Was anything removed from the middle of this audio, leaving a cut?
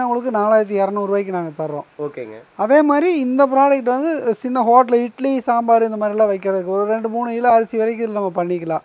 no; 0 cuts

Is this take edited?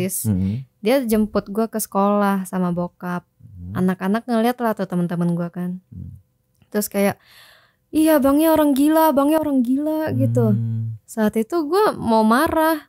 no; 0 cuts

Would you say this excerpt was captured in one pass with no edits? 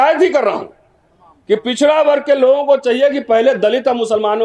yes; 0 cuts

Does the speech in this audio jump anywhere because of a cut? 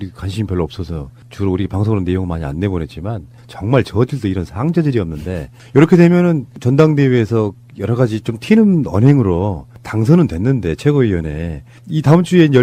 no; 0 cuts

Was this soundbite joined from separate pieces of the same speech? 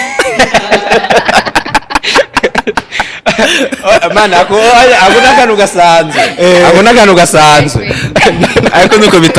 no; 0 cuts

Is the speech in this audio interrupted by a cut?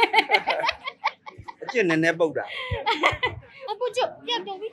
yes; 1 cut; at 3.5 s

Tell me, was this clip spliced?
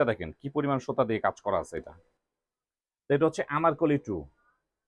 no; 0 cuts

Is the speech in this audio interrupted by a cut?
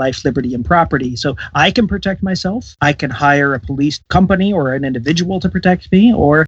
no; 0 cuts

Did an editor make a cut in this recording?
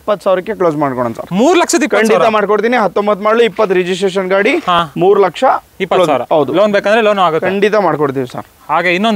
no; 0 cuts

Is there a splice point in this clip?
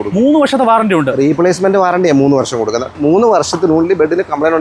yes; 1 cut; at 2.9 s

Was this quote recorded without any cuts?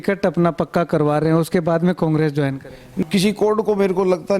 no; 1 cut; at 2.9 s

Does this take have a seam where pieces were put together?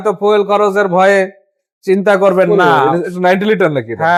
no; 0 cuts

